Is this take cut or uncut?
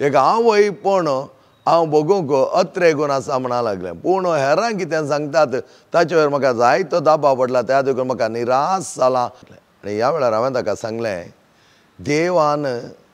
cut